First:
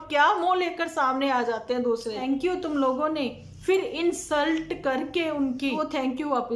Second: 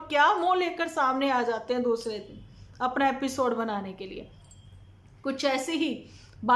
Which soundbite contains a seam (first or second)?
first